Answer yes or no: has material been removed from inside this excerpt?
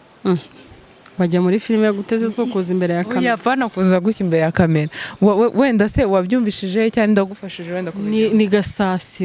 no